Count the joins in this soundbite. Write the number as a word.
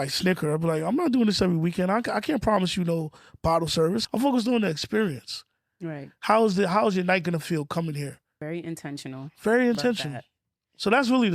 two